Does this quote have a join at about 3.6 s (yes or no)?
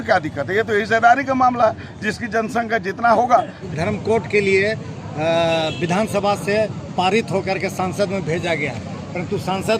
yes